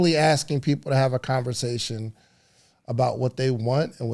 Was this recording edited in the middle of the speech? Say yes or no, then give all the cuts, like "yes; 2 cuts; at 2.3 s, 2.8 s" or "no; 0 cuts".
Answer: no; 0 cuts